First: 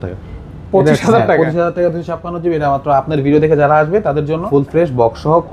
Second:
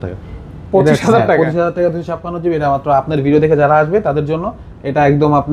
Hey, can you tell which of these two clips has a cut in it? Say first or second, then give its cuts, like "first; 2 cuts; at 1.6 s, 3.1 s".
first; 1 cut; at 4.4 s